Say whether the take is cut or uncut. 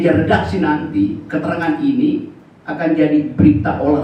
uncut